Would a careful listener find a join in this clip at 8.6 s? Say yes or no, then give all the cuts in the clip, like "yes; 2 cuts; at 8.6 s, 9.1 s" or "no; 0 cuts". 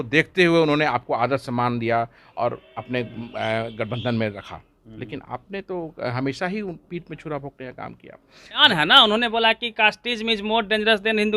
yes; 1 cut; at 8.6 s